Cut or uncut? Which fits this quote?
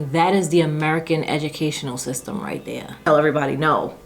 cut